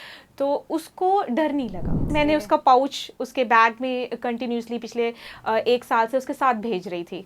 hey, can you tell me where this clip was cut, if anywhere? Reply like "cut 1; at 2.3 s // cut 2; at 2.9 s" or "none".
cut 1; at 2.1 s

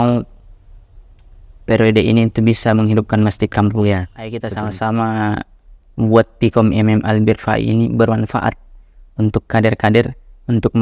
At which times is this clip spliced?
cut 1; at 4.4 s

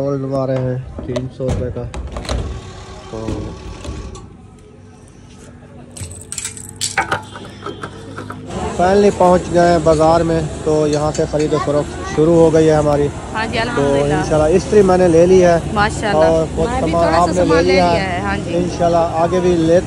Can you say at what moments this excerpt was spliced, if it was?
none

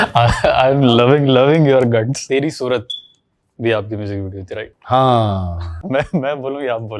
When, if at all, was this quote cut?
cut 1; at 2.2 s

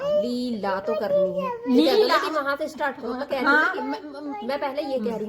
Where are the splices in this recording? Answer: none

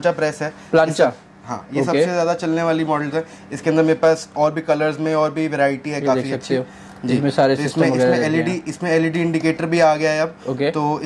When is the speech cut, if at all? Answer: none

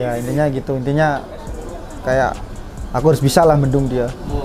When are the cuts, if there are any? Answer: none

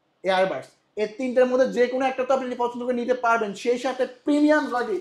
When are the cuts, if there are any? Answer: none

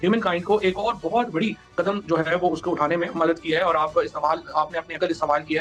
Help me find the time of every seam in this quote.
none

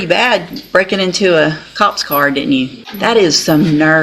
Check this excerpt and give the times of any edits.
cut 1; at 2.8 s

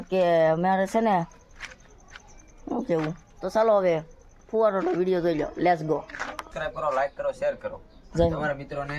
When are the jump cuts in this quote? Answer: cut 1; at 6.2 s

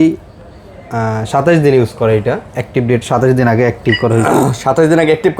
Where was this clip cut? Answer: none

